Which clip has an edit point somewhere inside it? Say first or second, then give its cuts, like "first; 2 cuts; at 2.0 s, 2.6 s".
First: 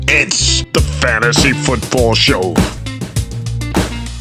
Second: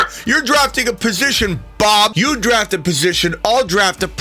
second; 1 cut; at 2.1 s